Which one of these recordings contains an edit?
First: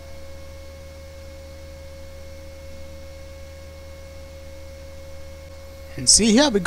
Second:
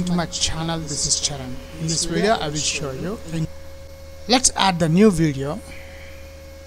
first; 1 cut; at 5.5 s

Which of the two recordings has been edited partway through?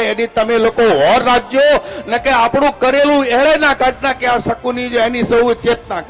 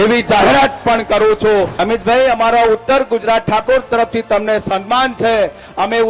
second; 1 cut; at 1.7 s

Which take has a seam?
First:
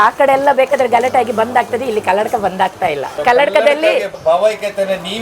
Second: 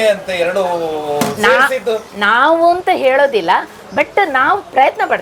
first; 2 cuts; at 3.1 s, 4.1 s

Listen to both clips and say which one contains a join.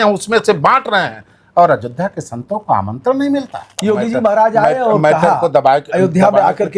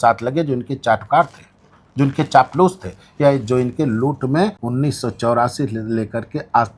first; 1 cut; at 3.8 s

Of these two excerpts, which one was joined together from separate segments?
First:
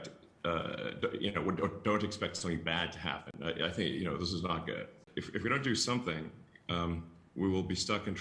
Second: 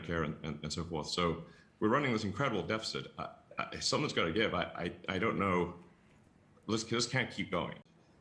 first; 1 cut; at 5.0 s

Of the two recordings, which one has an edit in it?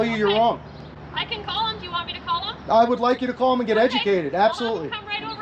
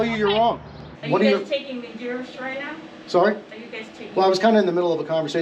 second; 1 cut; at 0.9 s

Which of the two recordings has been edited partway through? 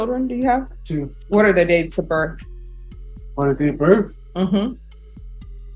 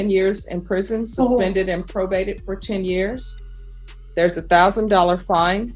first; 2 cuts; at 1.2 s, 4.8 s

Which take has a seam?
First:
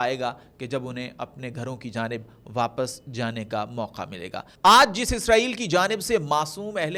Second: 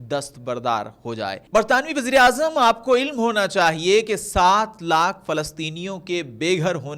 second; 1 cut; at 1.4 s

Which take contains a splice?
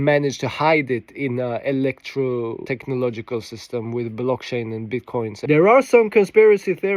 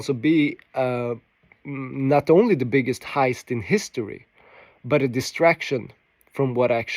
first; 2 cuts; at 2.6 s, 5.4 s

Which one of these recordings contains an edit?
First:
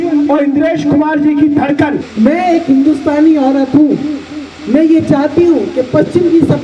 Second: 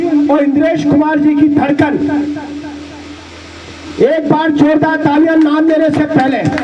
first; 1 cut; at 2.0 s

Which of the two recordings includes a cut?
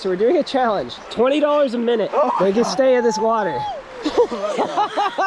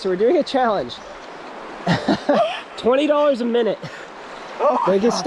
first; 2 cuts; at 1.0 s, 2.1 s

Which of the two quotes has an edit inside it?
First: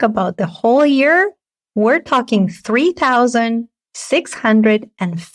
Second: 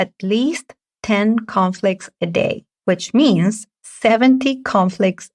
second; 1 cut; at 2.7 s

